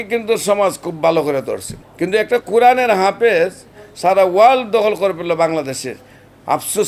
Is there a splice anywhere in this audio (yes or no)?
no